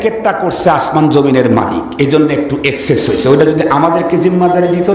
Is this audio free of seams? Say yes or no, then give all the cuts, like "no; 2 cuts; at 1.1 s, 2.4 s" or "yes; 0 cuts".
yes; 0 cuts